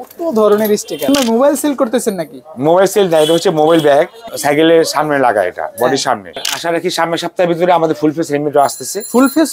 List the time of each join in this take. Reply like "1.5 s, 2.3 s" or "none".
1.1 s, 4.2 s, 6.5 s